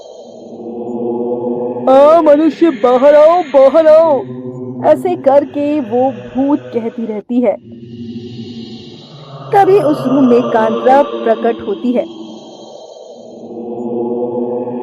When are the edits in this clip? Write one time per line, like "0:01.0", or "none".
0:01.8
0:07.6
0:09.5
0:12.1